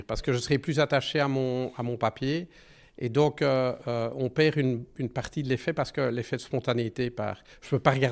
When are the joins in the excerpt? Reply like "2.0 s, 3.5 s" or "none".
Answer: none